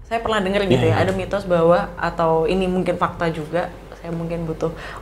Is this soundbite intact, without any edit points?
yes; 0 cuts

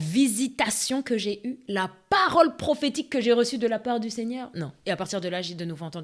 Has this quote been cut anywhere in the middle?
no; 0 cuts

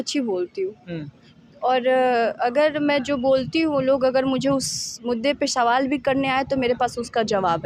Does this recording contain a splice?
no; 0 cuts

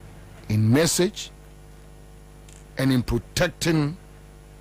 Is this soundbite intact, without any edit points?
no; 1 cut; at 2.5 s

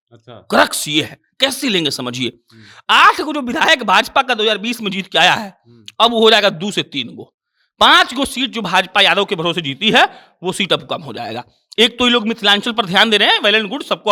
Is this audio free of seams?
yes; 0 cuts

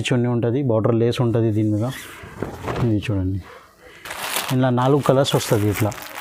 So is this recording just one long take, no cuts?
yes; 0 cuts

